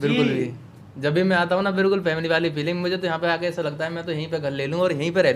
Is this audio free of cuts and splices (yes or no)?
yes